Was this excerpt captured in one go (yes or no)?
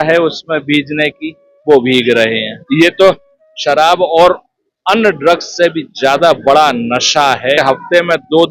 no